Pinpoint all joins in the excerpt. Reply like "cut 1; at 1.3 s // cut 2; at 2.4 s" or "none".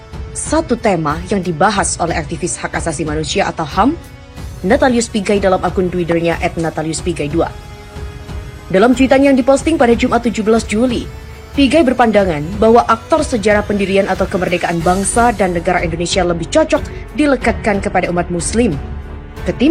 none